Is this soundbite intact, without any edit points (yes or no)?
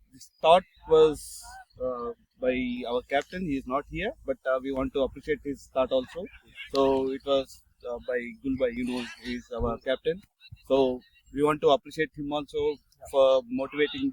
yes